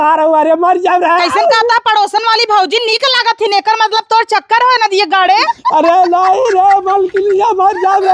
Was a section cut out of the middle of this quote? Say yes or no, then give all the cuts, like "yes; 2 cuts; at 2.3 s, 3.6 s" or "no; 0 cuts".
no; 0 cuts